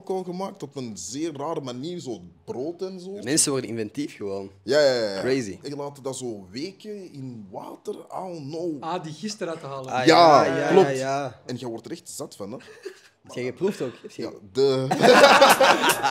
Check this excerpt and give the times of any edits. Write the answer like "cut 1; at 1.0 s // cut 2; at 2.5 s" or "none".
cut 1; at 3.2 s // cut 2; at 5.6 s // cut 3; at 8.8 s // cut 4; at 11.4 s // cut 5; at 15.2 s